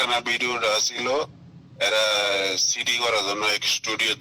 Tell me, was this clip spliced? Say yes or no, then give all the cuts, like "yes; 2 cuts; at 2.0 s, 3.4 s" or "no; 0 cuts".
no; 0 cuts